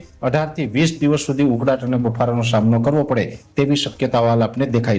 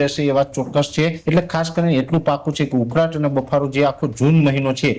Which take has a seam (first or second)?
second